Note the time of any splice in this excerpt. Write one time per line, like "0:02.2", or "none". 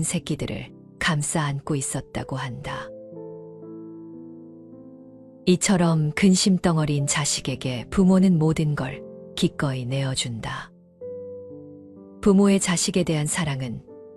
none